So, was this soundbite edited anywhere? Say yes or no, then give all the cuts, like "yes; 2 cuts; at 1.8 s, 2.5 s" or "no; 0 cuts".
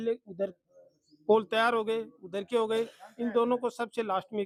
no; 0 cuts